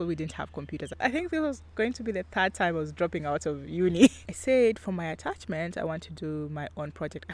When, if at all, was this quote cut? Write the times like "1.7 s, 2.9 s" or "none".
1.0 s, 4.3 s

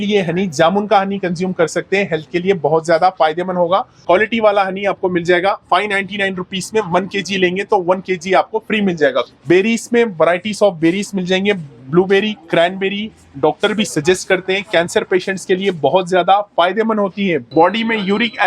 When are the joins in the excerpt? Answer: 3.9 s, 9.3 s, 17.5 s

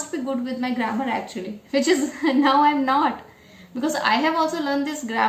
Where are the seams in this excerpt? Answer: none

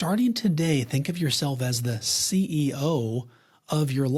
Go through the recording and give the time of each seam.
none

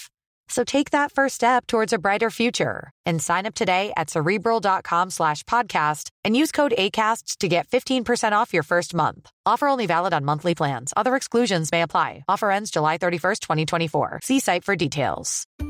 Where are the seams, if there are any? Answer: none

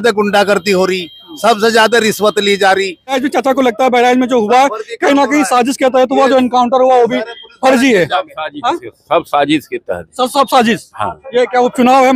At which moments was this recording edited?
none

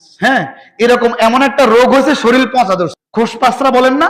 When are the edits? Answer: 3.0 s

